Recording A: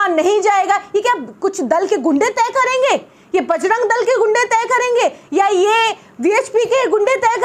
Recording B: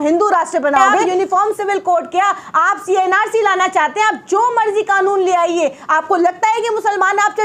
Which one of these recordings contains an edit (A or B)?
B